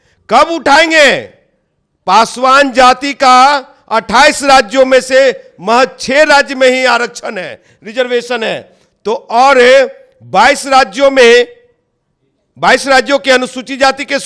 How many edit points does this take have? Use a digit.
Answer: 0